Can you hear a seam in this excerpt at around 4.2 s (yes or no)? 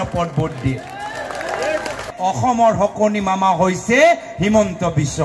no